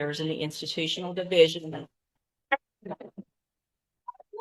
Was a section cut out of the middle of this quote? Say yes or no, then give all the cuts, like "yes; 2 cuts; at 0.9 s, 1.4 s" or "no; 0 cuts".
no; 0 cuts